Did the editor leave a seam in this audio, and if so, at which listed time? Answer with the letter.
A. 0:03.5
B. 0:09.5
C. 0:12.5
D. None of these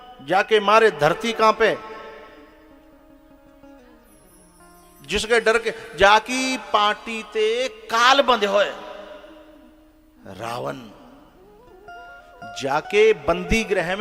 D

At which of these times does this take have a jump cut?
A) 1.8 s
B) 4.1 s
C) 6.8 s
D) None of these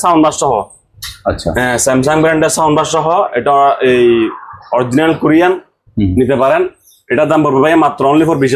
D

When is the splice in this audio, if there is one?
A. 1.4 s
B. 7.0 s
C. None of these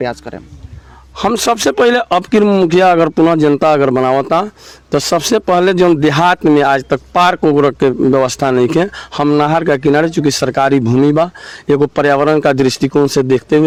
C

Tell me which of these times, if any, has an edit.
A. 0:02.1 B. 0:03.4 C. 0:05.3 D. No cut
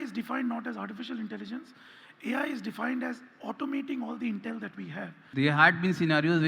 C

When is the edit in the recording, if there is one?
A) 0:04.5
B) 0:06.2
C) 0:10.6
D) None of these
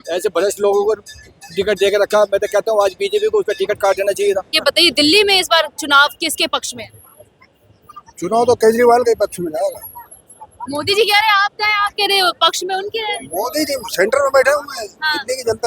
A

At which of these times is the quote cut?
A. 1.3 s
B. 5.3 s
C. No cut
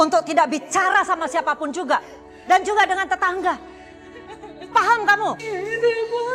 C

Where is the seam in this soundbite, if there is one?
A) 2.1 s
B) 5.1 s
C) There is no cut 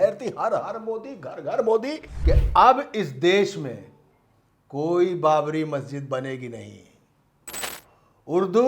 A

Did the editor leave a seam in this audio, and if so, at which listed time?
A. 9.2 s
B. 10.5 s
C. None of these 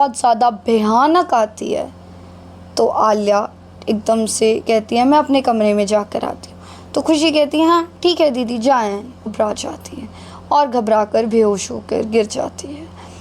A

